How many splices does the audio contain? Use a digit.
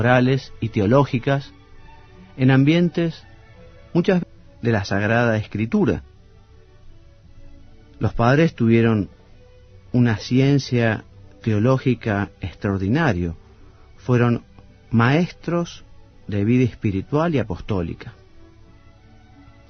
0